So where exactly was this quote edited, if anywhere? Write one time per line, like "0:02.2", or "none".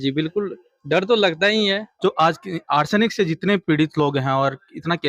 0:01.9